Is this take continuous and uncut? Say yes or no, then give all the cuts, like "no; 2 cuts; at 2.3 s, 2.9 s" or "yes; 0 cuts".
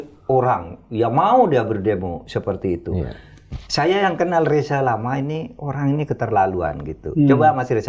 yes; 0 cuts